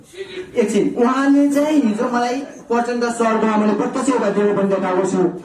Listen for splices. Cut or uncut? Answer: uncut